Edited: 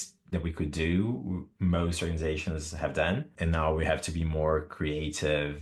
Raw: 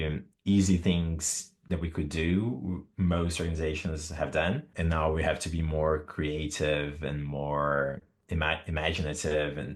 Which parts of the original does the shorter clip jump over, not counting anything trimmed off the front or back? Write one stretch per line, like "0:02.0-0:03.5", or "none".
none